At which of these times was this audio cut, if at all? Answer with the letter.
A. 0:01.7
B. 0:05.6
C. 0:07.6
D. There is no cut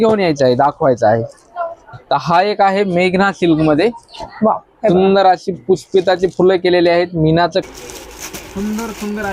C